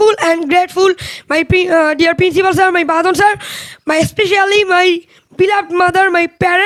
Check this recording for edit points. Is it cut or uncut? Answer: uncut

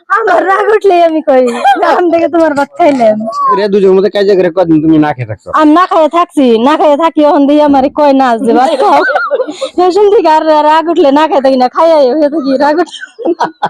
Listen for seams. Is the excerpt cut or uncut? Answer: cut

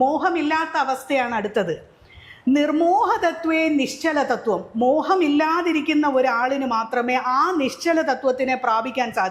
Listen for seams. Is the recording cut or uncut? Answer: uncut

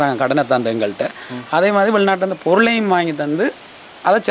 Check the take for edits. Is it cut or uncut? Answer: uncut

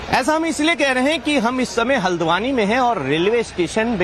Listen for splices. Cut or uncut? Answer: uncut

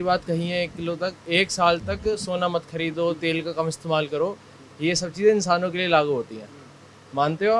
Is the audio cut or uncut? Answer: uncut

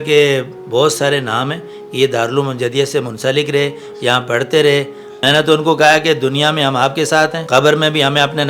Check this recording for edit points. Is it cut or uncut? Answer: cut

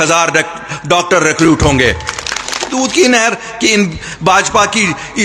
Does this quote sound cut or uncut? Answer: cut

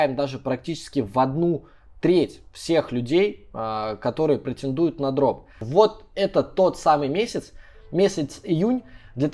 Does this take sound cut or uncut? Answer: cut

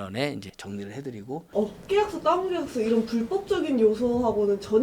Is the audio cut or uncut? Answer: cut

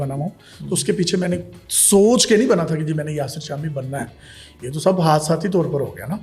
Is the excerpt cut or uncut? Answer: uncut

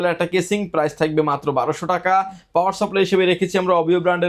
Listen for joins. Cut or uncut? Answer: uncut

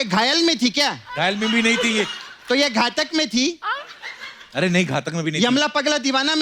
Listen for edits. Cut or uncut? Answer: uncut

